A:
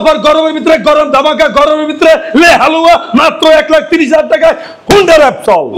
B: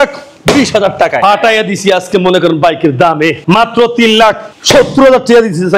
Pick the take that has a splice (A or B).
B